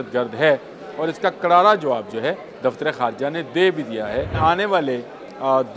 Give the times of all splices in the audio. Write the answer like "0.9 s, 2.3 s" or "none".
2.5 s, 4.3 s